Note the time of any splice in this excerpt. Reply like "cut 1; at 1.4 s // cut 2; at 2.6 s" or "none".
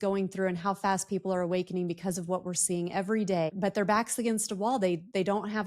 cut 1; at 3.5 s